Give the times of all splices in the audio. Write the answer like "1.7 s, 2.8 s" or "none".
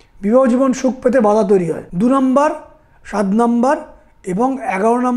1.9 s